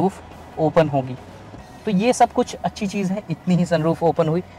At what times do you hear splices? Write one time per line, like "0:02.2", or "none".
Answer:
none